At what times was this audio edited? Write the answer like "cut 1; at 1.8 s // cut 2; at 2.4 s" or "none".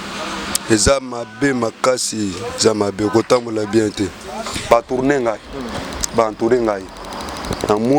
cut 1; at 4.5 s